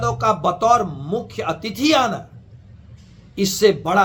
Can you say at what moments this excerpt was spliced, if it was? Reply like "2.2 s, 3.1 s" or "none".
none

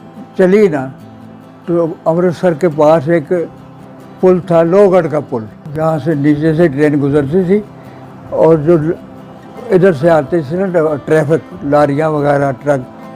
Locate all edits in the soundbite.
5.6 s

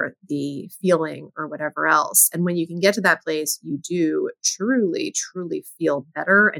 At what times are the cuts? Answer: none

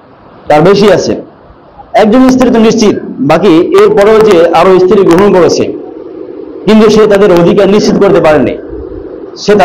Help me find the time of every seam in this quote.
none

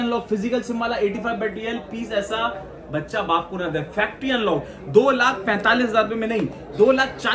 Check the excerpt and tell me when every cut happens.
none

